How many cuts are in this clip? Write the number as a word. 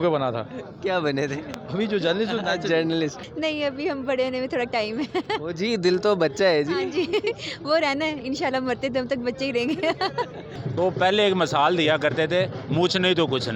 two